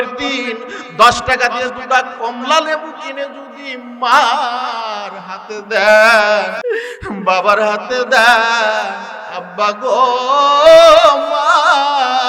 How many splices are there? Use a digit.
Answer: 1